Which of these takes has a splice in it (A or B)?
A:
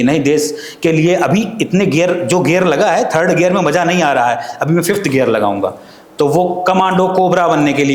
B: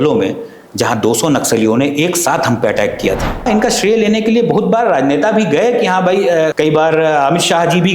B